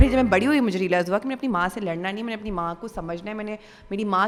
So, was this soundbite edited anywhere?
no; 0 cuts

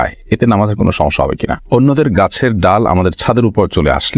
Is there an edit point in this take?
yes; 1 cut; at 1.6 s

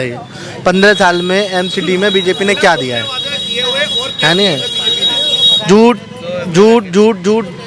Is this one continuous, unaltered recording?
yes; 0 cuts

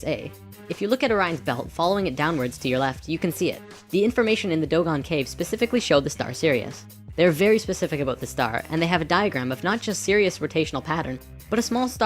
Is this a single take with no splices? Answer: no; 1 cut; at 5.4 s

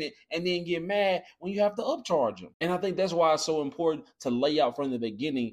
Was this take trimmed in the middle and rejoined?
yes; 1 cut; at 2.5 s

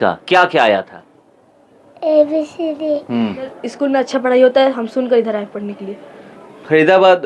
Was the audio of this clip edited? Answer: yes; 1 cut; at 3.6 s

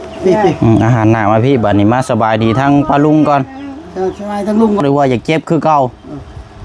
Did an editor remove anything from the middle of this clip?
yes; 1 cut; at 4.8 s

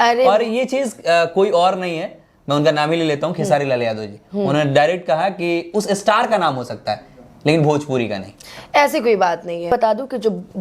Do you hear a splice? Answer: yes; 1 cut; at 9.7 s

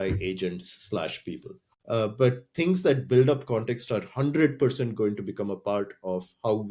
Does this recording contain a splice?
yes; 1 cut; at 1.8 s

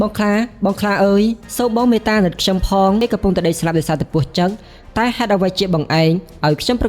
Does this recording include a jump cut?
yes; 1 cut; at 3.0 s

